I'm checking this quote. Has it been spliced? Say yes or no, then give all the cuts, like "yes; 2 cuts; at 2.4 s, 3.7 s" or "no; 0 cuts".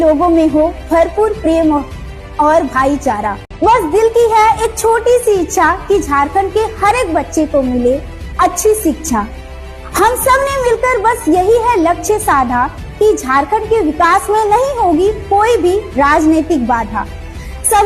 yes; 1 cut; at 3.4 s